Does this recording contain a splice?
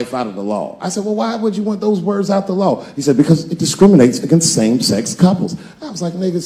no; 0 cuts

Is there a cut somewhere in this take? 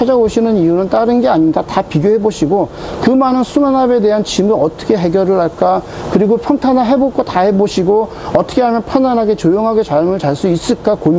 no; 0 cuts

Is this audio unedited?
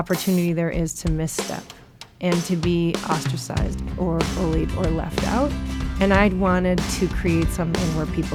yes; 0 cuts

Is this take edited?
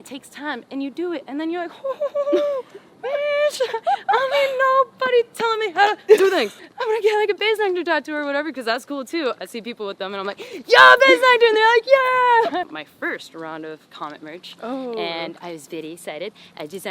yes; 2 cuts; at 6.6 s, 12.7 s

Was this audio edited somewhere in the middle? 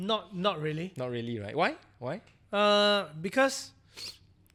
no; 0 cuts

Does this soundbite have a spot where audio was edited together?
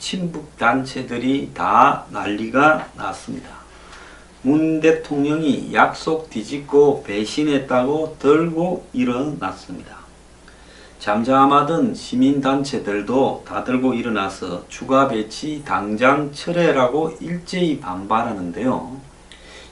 yes; 1 cut; at 14.6 s

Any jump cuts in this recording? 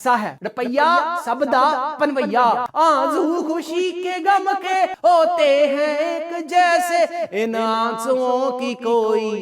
yes; 1 cut; at 2.7 s

